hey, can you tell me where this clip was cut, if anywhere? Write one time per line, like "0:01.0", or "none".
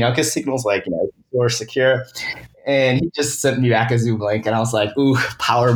none